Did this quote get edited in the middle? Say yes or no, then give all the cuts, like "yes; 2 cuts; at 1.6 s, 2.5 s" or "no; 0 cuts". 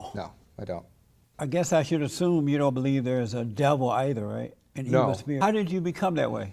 yes; 1 cut; at 5.4 s